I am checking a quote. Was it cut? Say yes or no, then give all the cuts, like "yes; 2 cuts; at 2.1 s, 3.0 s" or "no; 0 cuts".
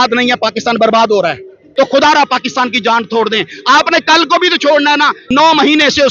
yes; 2 cuts; at 1.7 s, 5.2 s